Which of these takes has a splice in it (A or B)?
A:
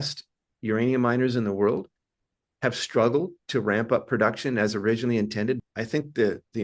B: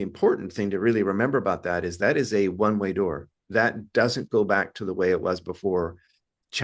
A